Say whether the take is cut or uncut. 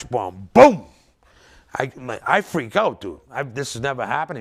uncut